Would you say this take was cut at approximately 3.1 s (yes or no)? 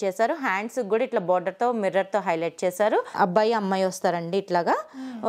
yes